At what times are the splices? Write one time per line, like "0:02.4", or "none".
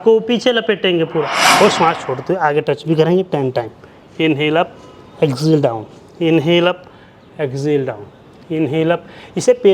0:01.4